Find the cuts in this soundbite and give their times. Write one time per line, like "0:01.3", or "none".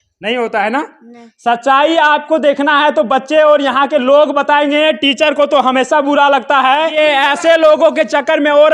0:06.9

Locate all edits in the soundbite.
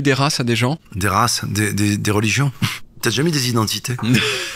0:00.9
0:03.0

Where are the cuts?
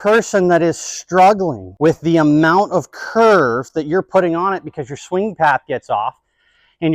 0:01.6

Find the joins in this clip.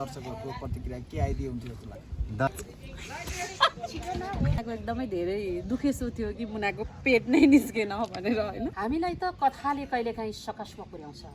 0:02.7
0:04.6
0:08.7

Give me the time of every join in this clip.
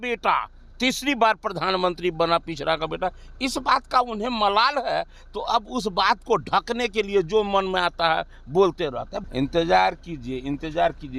0:09.2

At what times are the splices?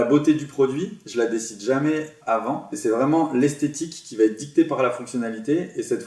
0:01.0
0:02.7

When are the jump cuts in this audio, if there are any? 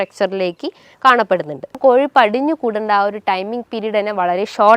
0:01.8

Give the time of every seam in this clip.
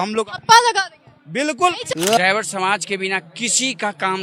0:01.9

